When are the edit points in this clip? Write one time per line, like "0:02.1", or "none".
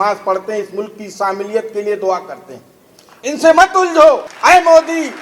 0:04.3